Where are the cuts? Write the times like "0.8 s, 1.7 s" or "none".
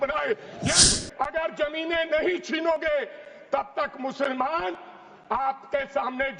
0.9 s

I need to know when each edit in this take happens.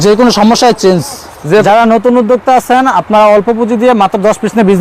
1.6 s

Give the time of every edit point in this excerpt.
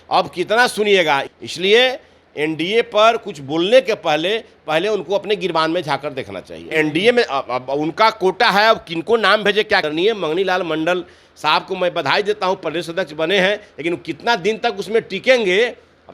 1.3 s, 6.6 s, 9.8 s

